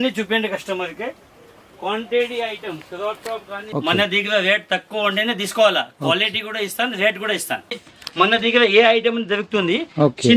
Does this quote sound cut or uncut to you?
cut